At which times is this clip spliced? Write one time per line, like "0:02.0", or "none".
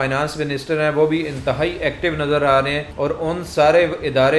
0:02.8